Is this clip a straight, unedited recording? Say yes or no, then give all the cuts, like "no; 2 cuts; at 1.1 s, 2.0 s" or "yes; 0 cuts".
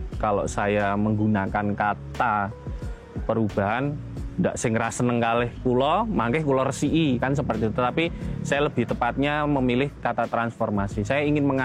yes; 0 cuts